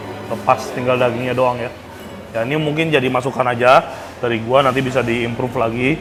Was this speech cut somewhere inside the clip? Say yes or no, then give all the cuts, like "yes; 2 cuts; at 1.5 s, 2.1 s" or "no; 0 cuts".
no; 0 cuts